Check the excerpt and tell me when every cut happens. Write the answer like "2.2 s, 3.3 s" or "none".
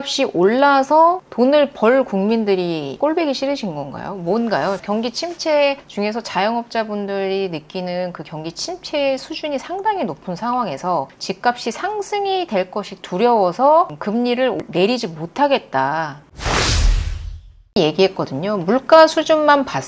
2.9 s, 4.8 s, 16.4 s, 17.8 s